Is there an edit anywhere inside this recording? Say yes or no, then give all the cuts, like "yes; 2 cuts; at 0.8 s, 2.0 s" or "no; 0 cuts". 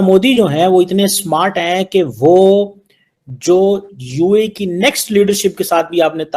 no; 0 cuts